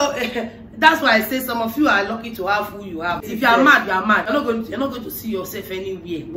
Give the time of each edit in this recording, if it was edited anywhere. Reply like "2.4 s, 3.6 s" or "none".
3.3 s, 4.3 s